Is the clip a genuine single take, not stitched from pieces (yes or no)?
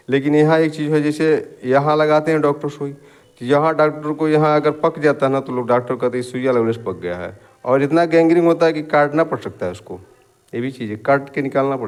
yes